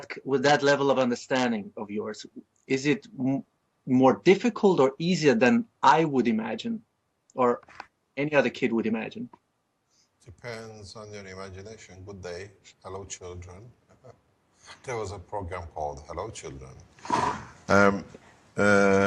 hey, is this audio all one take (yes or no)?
yes